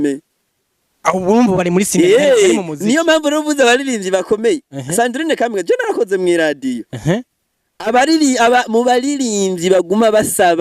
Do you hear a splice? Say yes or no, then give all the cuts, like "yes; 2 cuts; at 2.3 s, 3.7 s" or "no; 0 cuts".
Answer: no; 0 cuts